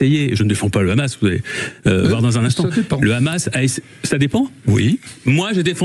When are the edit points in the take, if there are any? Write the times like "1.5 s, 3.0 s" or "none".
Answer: none